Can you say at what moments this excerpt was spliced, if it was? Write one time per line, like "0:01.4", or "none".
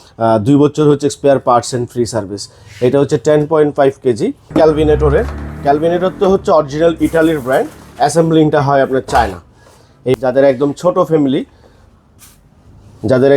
0:04.5
0:10.2